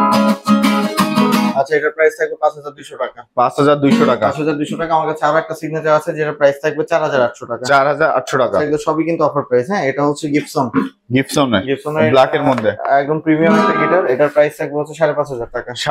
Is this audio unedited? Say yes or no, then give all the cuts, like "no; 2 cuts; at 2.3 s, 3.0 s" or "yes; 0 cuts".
yes; 0 cuts